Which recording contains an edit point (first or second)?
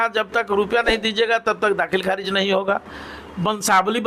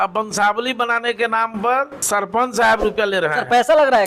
second